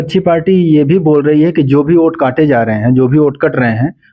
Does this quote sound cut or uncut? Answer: uncut